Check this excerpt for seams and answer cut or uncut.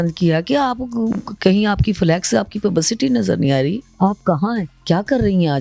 cut